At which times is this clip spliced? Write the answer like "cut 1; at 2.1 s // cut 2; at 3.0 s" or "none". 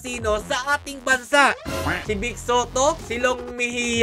cut 1; at 2.0 s